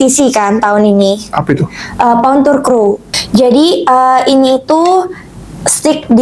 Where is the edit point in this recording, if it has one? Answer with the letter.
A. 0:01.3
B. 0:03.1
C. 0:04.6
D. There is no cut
B